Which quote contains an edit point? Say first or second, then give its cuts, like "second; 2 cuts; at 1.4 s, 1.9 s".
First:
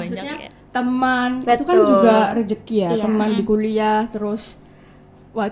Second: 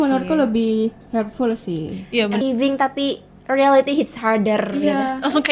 second; 1 cut; at 2.4 s